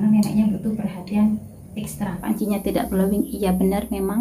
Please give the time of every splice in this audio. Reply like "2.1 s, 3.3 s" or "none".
2.1 s